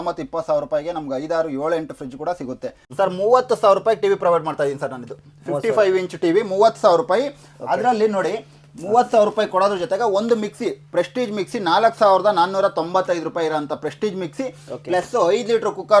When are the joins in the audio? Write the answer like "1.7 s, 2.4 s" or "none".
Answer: 2.8 s